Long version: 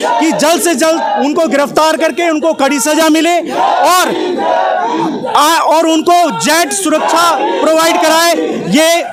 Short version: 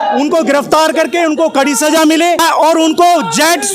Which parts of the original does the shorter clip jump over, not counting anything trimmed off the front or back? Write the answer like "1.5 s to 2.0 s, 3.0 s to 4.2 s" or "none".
3.4 s to 5.5 s